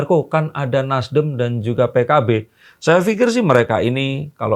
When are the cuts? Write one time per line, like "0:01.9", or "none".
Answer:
none